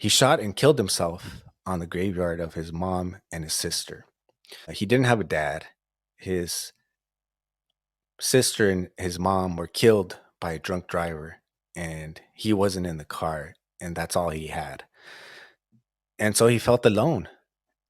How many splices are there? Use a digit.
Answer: 1